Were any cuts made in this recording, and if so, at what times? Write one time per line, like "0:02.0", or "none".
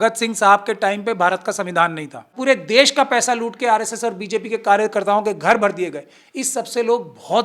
0:02.3

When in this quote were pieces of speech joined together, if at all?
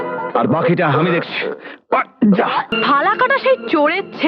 0:02.7

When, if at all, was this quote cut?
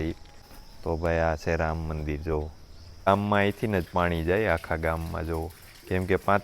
0:03.1

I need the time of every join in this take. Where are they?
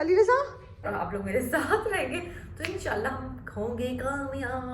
0:01.0

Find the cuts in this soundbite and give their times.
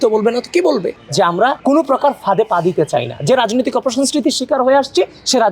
0:00.9

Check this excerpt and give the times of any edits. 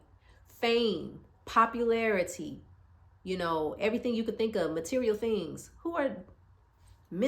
none

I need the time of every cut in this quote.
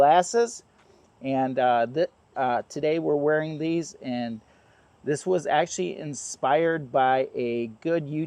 none

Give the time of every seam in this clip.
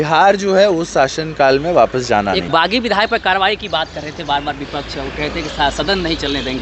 0:02.4

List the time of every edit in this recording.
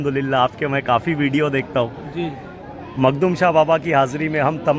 none

